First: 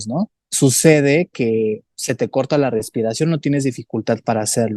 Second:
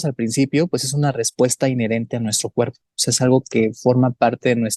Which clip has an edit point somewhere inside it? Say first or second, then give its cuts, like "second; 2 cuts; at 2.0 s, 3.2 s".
first; 1 cut; at 1.9 s